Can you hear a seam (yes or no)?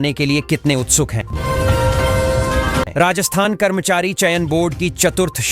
yes